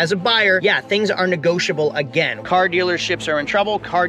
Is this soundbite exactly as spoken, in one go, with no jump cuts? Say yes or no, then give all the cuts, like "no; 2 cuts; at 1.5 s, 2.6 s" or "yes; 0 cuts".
no; 1 cut; at 2.4 s